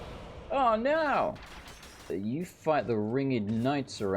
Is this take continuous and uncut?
no; 1 cut; at 2.1 s

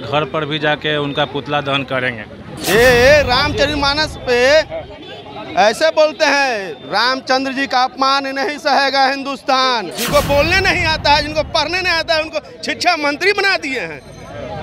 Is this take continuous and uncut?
no; 2 cuts; at 2.5 s, 9.9 s

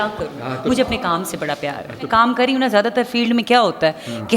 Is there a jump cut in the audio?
yes; 1 cut; at 2.2 s

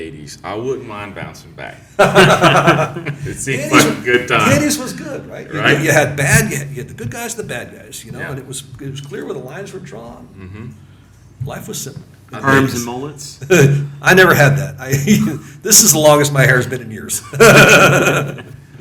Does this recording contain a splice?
no; 0 cuts

